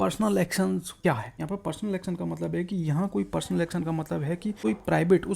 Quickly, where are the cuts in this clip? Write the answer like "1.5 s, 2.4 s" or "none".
1.1 s, 4.6 s